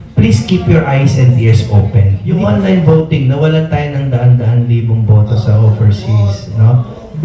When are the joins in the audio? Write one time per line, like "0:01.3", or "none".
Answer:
0:02.2